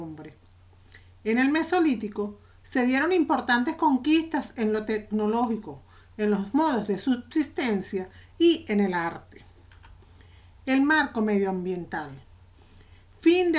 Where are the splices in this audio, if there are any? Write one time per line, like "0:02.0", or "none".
none